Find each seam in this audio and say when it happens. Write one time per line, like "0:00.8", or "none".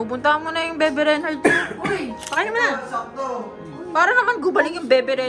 0:02.2